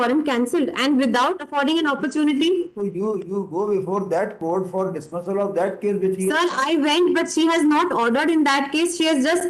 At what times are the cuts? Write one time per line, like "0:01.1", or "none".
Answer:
none